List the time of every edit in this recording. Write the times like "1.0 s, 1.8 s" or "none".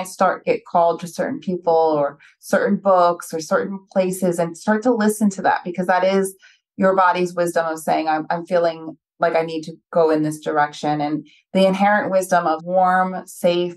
12.6 s